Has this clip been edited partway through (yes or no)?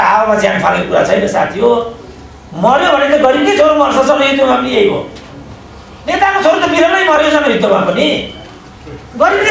no